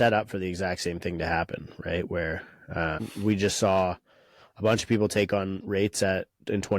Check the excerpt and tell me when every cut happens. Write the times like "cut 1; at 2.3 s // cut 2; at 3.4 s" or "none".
cut 1; at 3.0 s